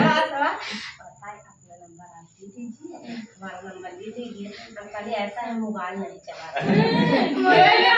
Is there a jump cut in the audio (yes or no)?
no